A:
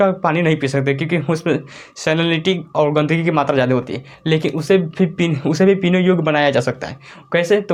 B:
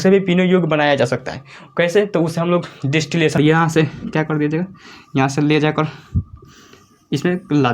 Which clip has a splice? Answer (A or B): B